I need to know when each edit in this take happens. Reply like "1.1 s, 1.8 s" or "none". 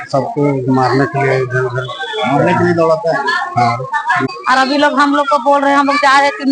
4.2 s